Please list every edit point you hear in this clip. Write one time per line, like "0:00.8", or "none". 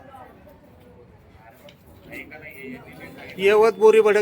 0:03.0